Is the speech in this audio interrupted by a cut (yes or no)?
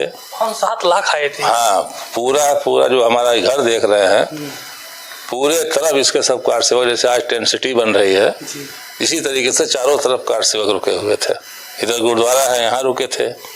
no